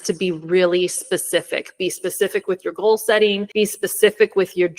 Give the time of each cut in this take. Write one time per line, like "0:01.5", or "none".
0:03.4